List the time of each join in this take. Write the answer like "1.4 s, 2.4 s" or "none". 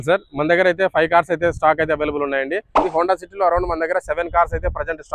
2.8 s